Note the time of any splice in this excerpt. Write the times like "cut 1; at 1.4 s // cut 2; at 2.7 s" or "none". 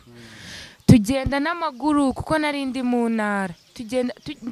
none